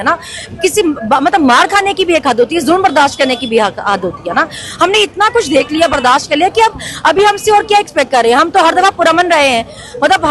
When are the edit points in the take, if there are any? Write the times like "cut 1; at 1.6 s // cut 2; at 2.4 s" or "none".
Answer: none